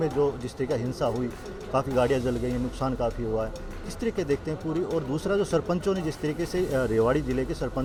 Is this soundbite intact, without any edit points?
yes; 0 cuts

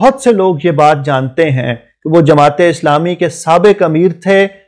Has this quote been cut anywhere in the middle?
no; 0 cuts

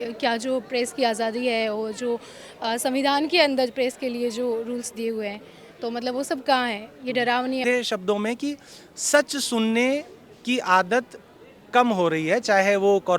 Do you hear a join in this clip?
yes; 1 cut; at 7.6 s

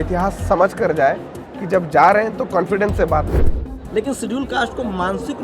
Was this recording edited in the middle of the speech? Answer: yes; 1 cut; at 3.6 s

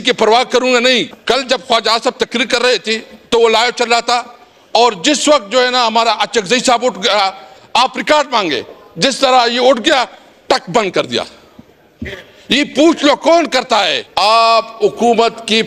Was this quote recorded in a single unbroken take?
no; 2 cuts; at 1.1 s, 14.0 s

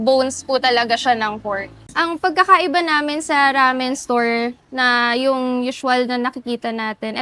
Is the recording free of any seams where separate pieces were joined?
yes; 0 cuts

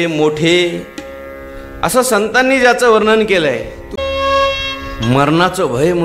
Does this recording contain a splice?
yes; 1 cut; at 4.0 s

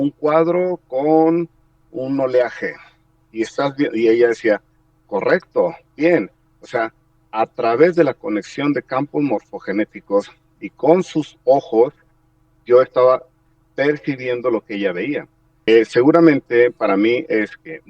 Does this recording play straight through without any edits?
no; 1 cut; at 15.7 s

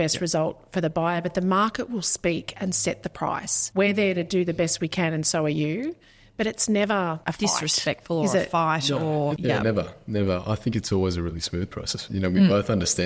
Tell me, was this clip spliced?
yes; 4 cuts; at 3.6 s, 7.2 s, 9.4 s, 11.9 s

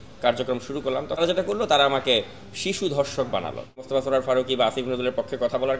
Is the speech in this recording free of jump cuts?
no; 2 cuts; at 1.2 s, 3.8 s

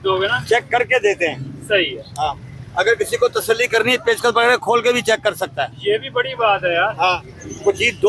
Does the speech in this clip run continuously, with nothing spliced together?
yes; 0 cuts

